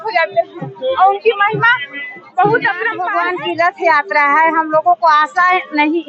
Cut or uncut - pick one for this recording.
cut